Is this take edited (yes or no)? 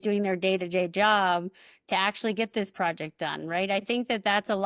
no